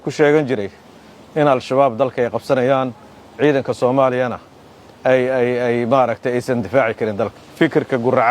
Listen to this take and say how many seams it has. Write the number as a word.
one